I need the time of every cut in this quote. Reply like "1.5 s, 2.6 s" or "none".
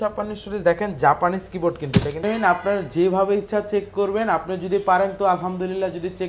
2.2 s